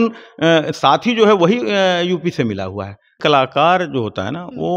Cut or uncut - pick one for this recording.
cut